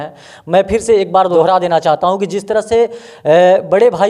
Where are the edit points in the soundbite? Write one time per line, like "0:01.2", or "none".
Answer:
0:01.3